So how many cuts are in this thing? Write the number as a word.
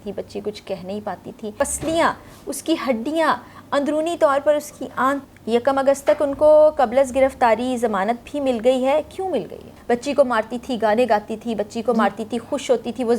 three